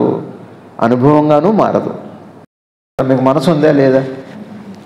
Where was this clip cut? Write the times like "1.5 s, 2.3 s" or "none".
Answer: 3.0 s